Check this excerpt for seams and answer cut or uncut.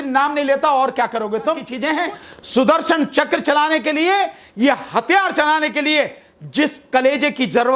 cut